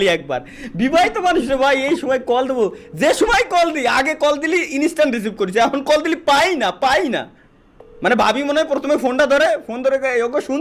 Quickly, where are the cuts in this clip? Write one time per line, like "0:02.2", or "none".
none